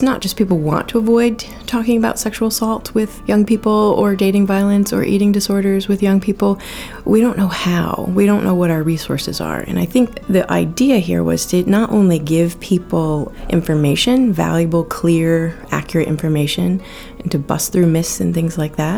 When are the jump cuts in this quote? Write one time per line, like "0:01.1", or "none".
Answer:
0:03.2
0:10.2
0:13.3